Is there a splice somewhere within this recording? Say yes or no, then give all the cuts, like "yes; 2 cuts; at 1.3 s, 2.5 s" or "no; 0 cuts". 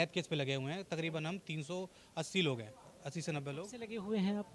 no; 0 cuts